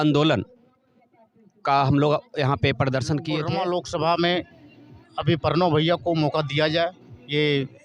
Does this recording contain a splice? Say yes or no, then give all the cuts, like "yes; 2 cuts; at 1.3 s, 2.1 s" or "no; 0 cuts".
yes; 1 cut; at 3.4 s